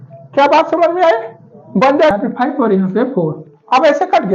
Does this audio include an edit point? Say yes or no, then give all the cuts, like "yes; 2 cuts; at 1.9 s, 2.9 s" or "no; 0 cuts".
yes; 1 cut; at 2.1 s